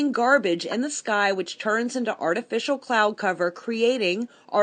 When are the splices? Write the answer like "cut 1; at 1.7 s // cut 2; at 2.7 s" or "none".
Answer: none